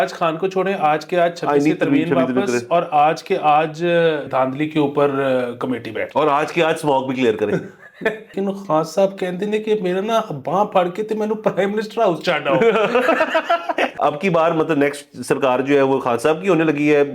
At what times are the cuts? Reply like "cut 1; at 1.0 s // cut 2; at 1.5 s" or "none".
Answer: cut 1; at 4.3 s // cut 2; at 8.3 s // cut 3; at 13.9 s